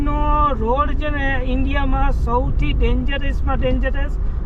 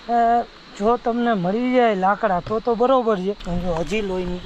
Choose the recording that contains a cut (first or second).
second